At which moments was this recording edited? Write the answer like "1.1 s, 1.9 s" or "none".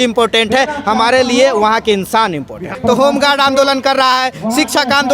2.7 s